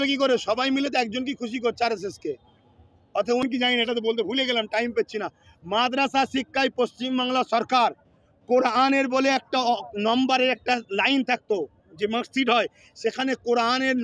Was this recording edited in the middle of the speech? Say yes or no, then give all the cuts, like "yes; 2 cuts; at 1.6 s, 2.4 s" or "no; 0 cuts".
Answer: yes; 1 cut; at 3.4 s